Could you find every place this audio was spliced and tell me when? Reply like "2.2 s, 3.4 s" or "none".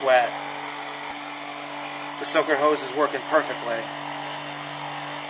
none